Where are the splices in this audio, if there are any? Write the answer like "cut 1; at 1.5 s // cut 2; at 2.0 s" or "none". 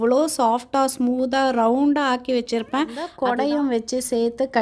cut 1; at 3.0 s